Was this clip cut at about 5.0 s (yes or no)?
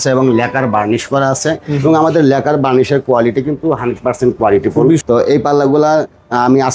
yes